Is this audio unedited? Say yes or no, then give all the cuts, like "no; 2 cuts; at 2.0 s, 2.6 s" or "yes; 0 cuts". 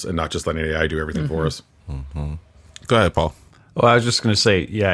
yes; 0 cuts